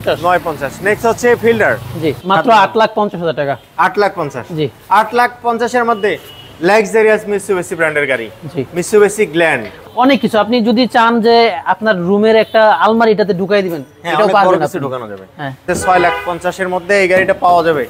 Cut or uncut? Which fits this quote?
cut